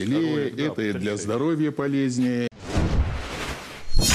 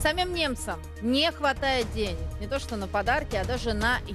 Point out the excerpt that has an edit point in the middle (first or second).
first